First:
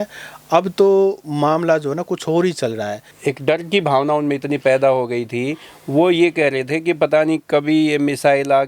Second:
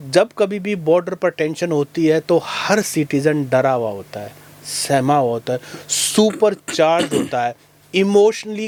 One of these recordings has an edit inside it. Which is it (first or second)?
first